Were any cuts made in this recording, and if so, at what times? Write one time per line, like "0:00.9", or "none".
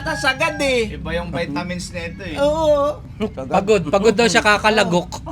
none